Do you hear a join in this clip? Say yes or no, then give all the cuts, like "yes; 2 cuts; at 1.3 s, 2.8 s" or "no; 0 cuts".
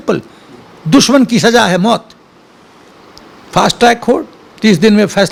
no; 0 cuts